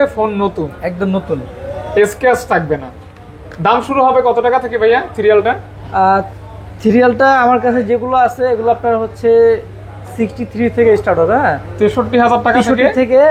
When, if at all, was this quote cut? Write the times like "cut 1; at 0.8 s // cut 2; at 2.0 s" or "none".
none